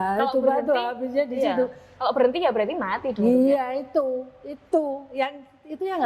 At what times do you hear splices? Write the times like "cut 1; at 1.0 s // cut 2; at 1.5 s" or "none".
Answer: none